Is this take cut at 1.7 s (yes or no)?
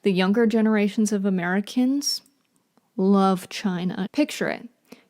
no